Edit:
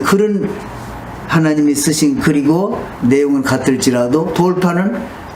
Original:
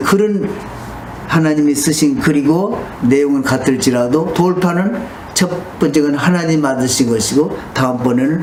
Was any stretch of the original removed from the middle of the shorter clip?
no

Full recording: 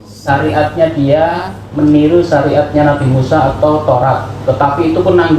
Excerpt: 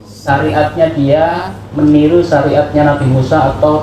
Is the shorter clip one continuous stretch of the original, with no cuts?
yes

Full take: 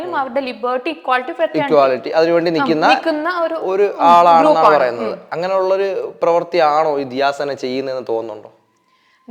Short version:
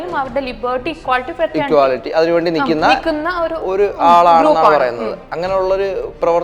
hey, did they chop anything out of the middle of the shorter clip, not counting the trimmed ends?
no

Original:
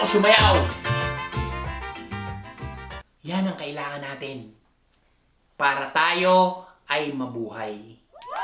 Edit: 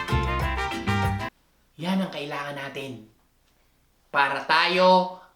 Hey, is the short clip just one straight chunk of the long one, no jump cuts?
no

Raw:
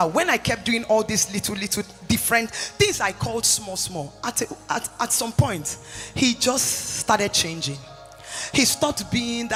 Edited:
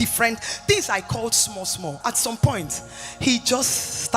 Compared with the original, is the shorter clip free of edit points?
no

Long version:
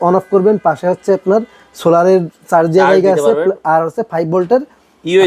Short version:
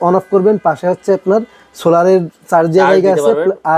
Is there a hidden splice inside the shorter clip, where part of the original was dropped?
no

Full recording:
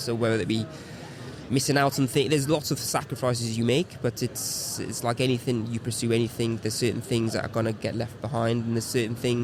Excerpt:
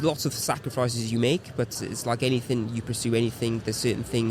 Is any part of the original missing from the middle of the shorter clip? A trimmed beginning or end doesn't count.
yes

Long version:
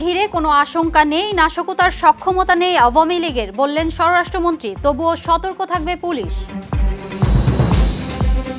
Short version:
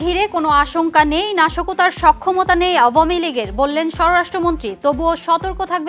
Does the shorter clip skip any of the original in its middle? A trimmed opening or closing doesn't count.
no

